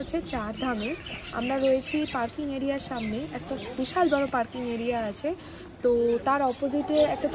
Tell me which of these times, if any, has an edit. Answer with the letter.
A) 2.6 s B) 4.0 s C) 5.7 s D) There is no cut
D